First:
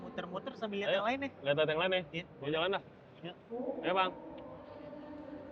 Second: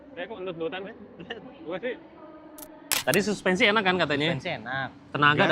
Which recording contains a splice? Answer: second; 1 cut; at 2.9 s

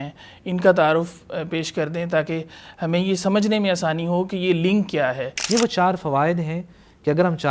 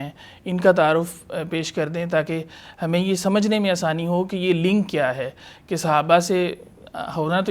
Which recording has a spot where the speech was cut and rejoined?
first; 1 cut; at 5.3 s

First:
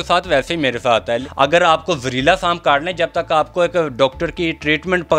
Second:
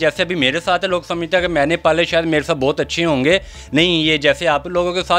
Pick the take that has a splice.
first; 1 cut; at 1.3 s

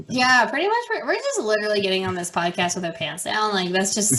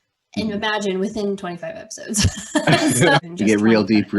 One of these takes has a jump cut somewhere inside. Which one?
second; 1 cut; at 3.2 s

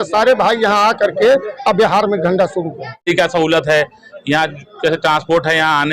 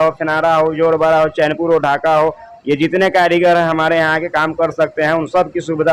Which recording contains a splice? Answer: first; 1 cut; at 3.0 s

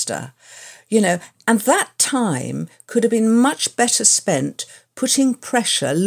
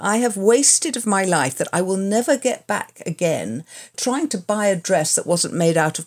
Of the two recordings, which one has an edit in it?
second; 1 cut; at 3.9 s

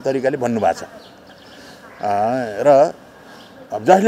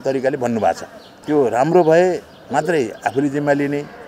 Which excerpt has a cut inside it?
second; 1 cut; at 1.2 s

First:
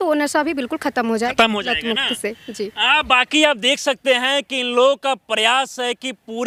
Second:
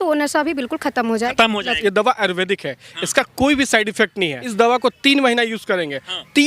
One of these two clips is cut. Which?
second; 2 cuts; at 1.8 s, 4.4 s

